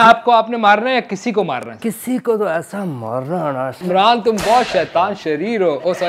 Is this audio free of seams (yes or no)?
no